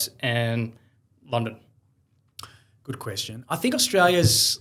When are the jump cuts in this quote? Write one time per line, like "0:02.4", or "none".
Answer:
none